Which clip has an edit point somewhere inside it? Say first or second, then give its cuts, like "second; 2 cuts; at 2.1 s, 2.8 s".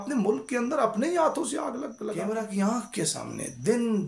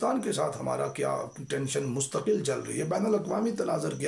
first; 1 cut; at 2.0 s